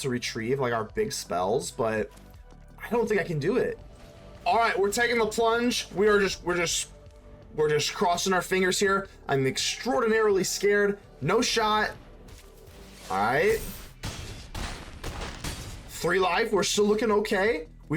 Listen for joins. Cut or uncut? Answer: cut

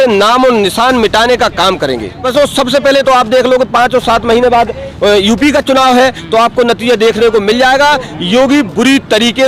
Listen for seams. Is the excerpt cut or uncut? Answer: cut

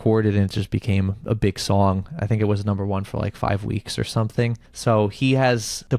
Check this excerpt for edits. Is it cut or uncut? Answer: cut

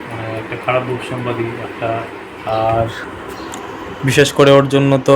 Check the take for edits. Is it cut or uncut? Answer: cut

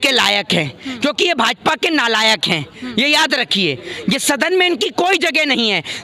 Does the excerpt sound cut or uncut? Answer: uncut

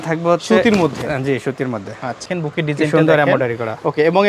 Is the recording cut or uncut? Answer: cut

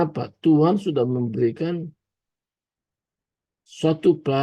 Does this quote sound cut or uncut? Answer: uncut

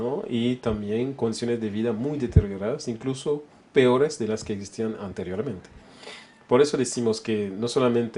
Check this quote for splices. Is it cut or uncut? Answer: cut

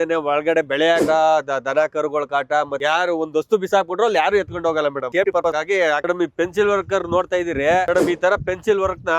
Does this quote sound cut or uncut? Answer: cut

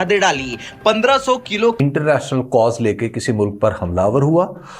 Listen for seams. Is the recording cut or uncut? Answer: cut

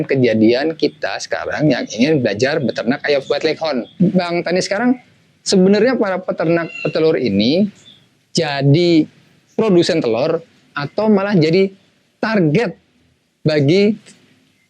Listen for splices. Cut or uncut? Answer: cut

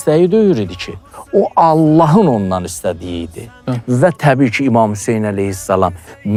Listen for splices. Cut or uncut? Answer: uncut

